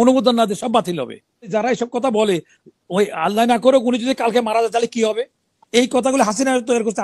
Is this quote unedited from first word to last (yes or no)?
no